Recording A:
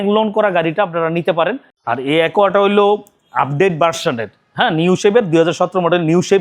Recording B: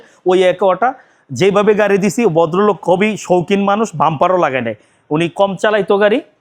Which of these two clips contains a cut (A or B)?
A